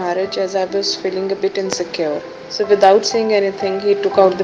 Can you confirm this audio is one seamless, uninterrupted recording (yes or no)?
no